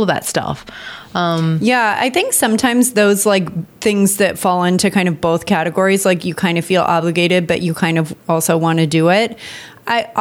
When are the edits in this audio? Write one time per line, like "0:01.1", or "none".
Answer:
0:03.7